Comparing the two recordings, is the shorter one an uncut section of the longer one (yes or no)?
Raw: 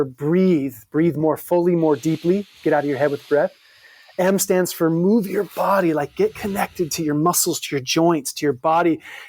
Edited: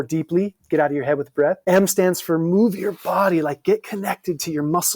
no